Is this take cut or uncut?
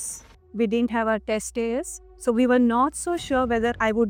uncut